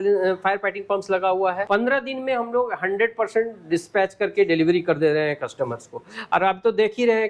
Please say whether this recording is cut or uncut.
cut